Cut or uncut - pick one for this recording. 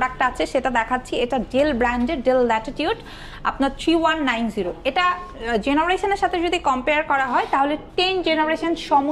uncut